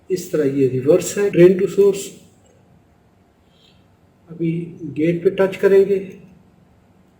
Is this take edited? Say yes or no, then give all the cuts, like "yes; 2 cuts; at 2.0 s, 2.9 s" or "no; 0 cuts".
yes; 1 cut; at 1.3 s